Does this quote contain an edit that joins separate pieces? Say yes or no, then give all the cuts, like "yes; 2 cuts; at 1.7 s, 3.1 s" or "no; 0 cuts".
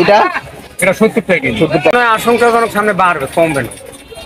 yes; 1 cut; at 1.9 s